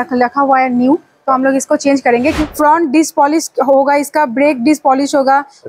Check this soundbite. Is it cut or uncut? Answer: cut